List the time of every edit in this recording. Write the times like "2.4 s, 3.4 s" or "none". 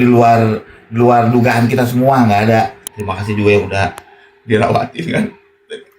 2.8 s